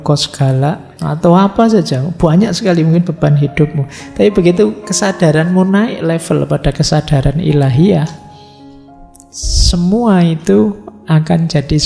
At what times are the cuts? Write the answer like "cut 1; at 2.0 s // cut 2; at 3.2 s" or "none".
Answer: none